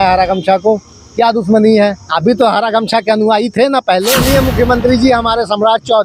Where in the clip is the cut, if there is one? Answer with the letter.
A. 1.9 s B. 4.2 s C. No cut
B